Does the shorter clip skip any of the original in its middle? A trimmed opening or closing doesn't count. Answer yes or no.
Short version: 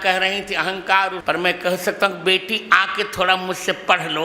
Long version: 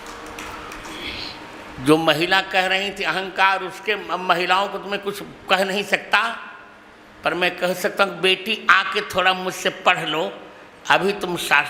yes